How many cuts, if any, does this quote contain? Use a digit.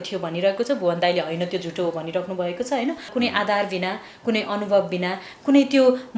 1